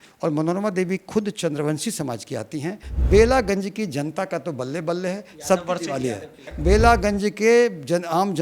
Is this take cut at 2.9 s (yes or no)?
yes